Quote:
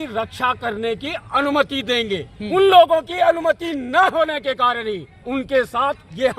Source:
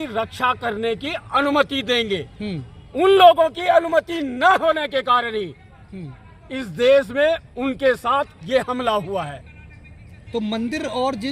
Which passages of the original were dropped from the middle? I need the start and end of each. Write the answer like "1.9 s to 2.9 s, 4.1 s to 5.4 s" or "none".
2.3 s to 2.8 s, 5.7 s to 7.5 s